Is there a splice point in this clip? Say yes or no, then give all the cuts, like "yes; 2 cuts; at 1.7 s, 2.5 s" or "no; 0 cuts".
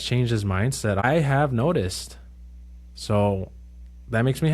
yes; 1 cut; at 1.0 s